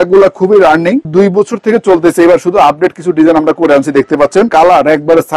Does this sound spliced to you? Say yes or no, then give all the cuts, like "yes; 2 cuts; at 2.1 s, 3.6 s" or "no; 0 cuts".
yes; 2 cuts; at 1.1 s, 4.5 s